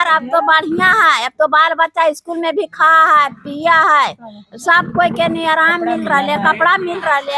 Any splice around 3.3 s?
no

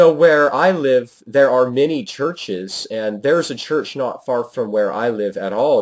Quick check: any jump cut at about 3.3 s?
yes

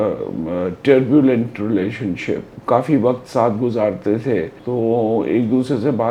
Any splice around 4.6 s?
yes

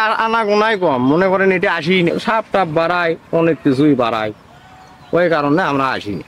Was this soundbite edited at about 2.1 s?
yes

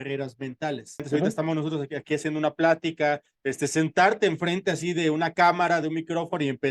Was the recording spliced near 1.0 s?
yes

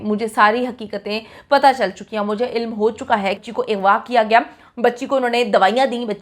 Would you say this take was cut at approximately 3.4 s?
yes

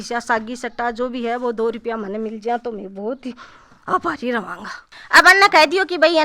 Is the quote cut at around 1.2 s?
no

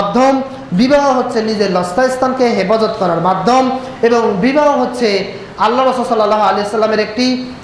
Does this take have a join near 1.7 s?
no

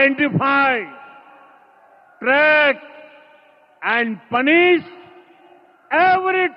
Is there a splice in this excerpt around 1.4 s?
no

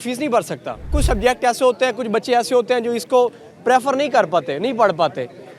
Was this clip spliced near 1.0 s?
yes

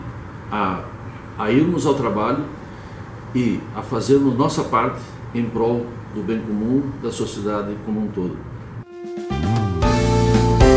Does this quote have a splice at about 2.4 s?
no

